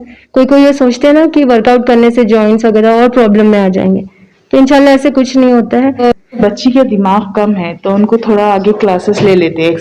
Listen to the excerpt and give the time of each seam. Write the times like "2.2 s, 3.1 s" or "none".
6.3 s